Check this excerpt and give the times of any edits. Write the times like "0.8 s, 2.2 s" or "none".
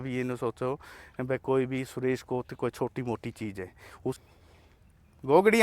4.2 s